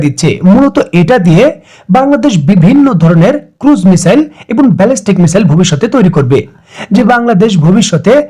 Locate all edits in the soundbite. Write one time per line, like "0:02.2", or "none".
0:06.6